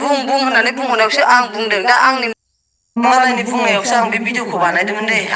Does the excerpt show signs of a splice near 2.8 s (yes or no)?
yes